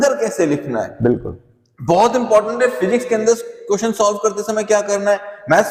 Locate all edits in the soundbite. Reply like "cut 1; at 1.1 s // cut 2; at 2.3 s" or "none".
none